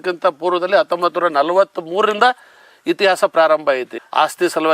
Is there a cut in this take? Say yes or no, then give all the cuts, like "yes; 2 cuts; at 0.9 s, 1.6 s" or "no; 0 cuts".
no; 0 cuts